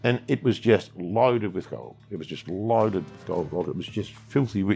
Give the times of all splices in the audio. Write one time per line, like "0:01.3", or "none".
none